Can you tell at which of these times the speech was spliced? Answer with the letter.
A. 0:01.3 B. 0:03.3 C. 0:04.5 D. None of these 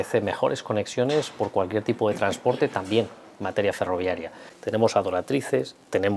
C